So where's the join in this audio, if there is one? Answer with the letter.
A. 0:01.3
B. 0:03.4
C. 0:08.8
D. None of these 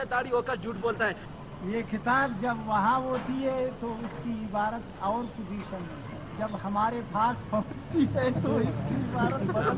A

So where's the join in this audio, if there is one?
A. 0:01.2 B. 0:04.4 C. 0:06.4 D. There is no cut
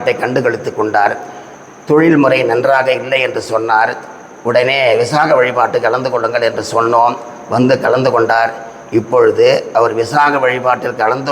D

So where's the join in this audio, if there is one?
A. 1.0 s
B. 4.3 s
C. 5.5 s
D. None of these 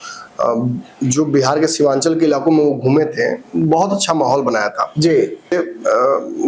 C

